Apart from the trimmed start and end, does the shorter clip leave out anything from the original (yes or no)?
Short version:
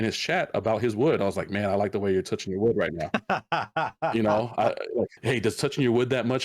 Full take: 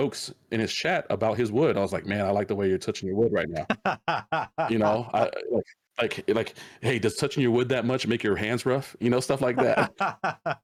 yes